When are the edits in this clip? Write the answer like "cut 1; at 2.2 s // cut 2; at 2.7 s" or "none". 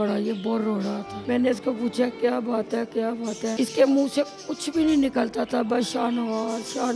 cut 1; at 1.1 s // cut 2; at 3.6 s